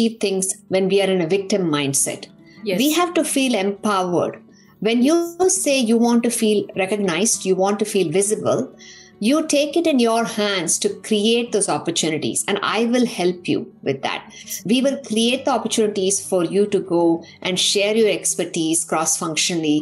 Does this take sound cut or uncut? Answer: uncut